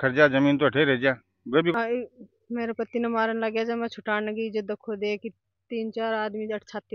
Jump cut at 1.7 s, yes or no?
yes